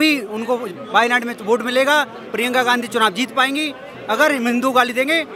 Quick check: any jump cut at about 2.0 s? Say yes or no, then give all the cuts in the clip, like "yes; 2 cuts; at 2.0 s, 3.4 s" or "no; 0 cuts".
no; 0 cuts